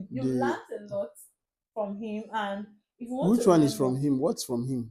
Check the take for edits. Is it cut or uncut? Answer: uncut